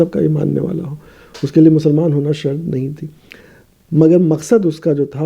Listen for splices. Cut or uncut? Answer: uncut